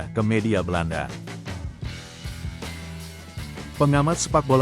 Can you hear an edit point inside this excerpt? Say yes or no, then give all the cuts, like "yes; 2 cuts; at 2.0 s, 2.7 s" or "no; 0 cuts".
yes; 2 cuts; at 1.1 s, 3.6 s